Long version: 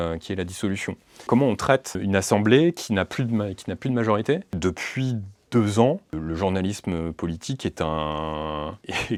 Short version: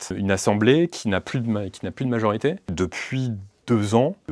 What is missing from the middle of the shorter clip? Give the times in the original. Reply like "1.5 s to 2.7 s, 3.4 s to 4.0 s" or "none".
none